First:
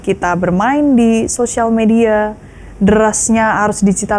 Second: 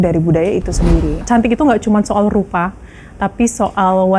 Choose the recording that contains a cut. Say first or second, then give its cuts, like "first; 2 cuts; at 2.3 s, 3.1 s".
second; 1 cut; at 1.2 s